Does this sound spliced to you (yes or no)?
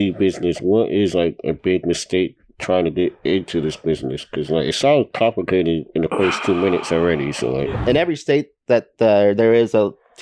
yes